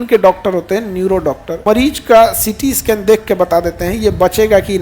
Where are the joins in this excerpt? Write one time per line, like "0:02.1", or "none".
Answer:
0:01.6